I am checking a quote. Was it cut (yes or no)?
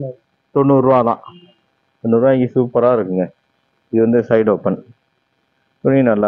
no